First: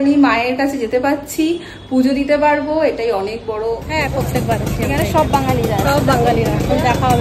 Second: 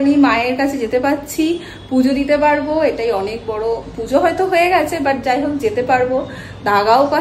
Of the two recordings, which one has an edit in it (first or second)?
first